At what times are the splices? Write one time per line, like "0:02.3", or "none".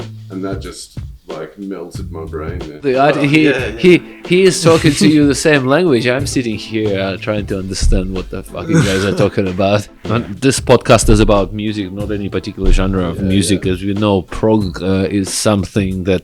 0:02.8
0:09.9

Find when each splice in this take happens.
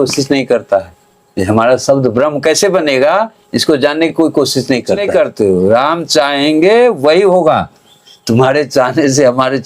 0:05.0

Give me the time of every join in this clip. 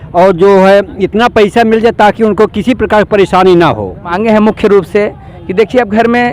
0:04.2

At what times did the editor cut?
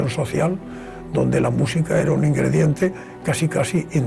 none

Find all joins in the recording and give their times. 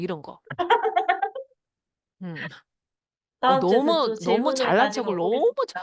none

